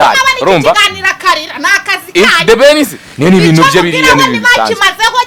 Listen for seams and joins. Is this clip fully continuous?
yes; 0 cuts

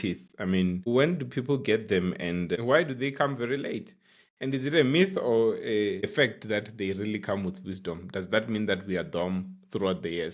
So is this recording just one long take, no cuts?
yes; 0 cuts

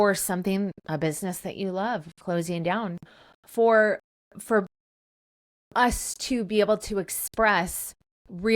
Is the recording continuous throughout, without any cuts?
yes; 0 cuts

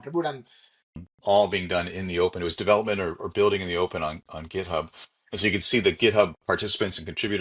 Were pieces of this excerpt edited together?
yes; 1 cut; at 1.0 s

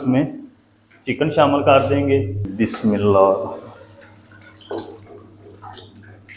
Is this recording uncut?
no; 1 cut; at 2.4 s

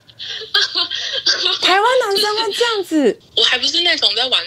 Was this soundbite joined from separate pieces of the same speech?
yes; 1 cut; at 3.3 s

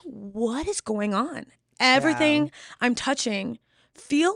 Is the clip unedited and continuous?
yes; 0 cuts

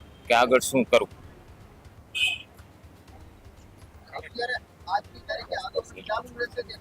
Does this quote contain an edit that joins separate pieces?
no; 0 cuts

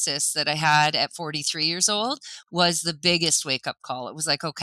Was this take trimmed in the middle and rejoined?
no; 0 cuts

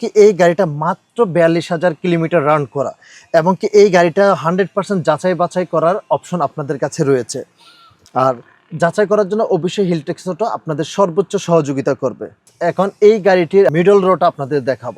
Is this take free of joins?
yes; 0 cuts

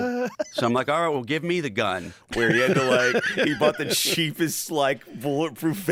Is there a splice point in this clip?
no; 0 cuts

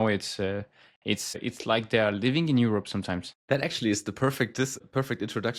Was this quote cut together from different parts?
yes; 3 cuts; at 1.4 s, 3.3 s, 4.8 s

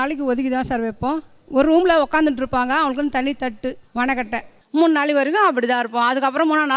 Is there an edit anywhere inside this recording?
no; 0 cuts

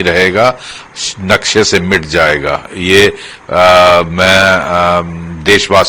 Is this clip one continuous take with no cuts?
yes; 0 cuts

